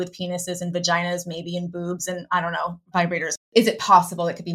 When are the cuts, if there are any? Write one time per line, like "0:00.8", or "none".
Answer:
0:03.2